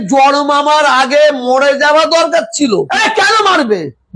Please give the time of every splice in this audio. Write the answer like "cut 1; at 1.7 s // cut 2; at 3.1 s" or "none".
cut 1; at 2.9 s